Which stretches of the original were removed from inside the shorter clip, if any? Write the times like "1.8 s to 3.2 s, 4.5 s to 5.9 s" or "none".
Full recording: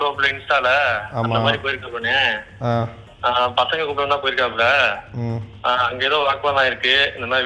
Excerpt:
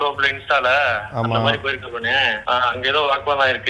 2.4 s to 5.5 s

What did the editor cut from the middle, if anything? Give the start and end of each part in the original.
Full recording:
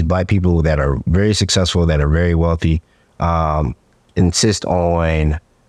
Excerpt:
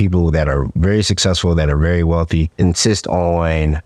2.8 s to 4.1 s

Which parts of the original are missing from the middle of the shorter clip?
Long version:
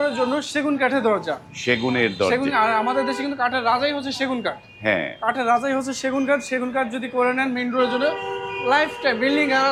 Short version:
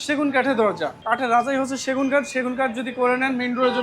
1.4 s to 5.1 s

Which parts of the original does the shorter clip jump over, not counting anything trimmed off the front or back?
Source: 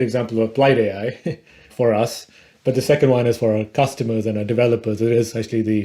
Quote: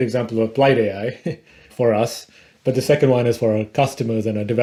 none

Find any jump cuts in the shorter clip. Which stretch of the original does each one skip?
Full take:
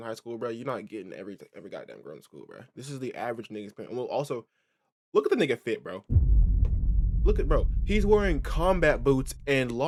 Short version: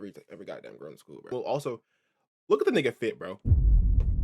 2.6 s to 4.0 s

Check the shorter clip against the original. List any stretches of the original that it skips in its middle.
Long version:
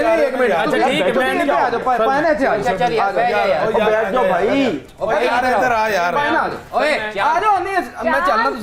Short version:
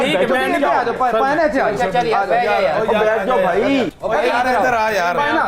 4.8 s to 4.9 s

